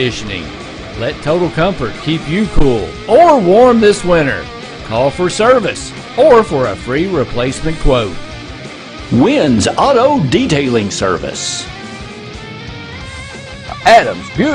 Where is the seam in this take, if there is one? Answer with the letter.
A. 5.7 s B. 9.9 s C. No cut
C